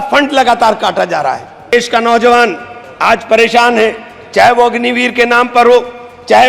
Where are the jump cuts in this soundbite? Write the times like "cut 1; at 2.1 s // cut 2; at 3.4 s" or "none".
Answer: cut 1; at 1.7 s